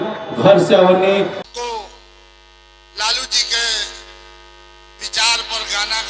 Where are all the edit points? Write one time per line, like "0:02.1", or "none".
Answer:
0:01.4